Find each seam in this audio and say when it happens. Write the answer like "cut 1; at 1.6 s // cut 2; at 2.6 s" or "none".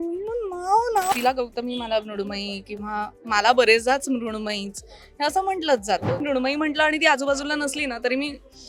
cut 1; at 1.1 s // cut 2; at 6.2 s